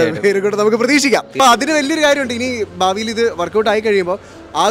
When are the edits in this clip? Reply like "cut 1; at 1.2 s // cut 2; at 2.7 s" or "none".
cut 1; at 1.3 s